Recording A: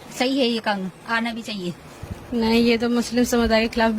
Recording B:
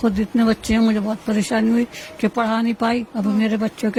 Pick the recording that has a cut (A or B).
A